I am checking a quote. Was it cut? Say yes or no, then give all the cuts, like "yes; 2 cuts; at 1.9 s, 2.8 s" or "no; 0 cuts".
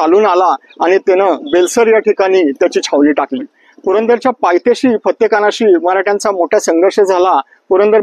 yes; 1 cut; at 3.6 s